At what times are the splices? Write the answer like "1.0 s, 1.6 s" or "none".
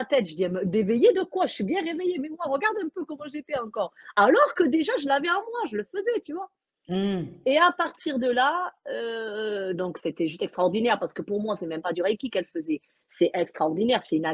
none